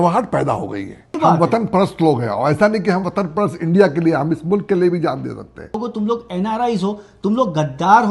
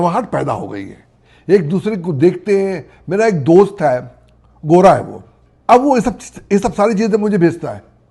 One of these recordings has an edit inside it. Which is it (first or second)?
first